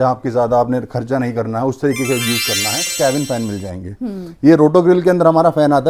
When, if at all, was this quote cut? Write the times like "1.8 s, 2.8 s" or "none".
2.9 s

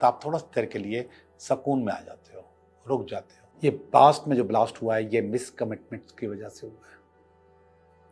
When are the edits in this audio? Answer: 3.4 s

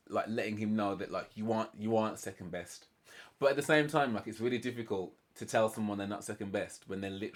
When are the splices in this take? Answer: none

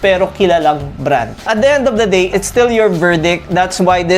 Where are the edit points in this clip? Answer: 1.4 s, 2.3 s

